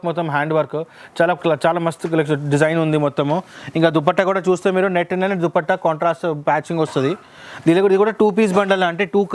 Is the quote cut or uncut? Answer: uncut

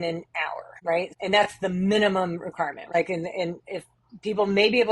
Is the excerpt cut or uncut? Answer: cut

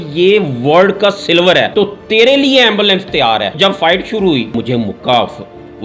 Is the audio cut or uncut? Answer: cut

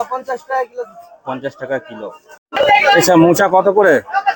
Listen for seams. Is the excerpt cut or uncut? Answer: cut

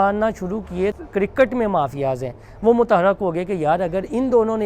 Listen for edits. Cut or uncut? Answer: cut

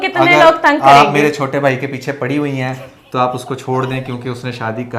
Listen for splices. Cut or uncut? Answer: uncut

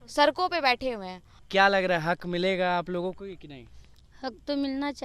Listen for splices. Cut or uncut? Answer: cut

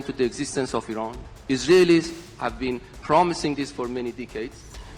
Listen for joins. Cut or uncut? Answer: uncut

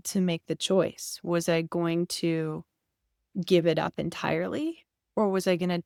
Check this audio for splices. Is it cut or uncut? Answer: uncut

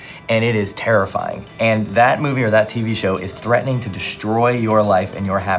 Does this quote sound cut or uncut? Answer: uncut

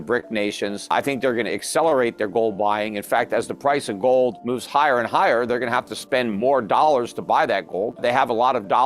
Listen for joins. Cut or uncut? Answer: cut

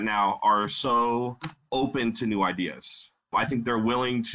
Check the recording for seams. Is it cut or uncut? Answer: cut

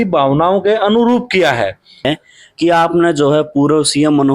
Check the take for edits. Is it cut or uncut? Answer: cut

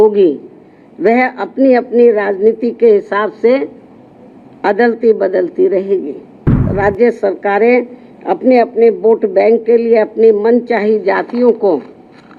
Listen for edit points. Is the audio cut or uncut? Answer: cut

